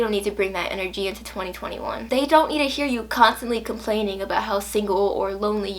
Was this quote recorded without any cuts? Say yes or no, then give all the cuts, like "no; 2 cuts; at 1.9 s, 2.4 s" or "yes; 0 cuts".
no; 1 cut; at 1.9 s